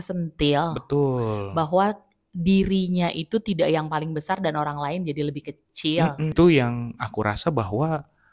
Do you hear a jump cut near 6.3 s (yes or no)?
yes